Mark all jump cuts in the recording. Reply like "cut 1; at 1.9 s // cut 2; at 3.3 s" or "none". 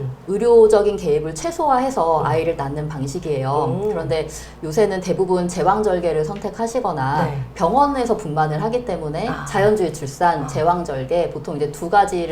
none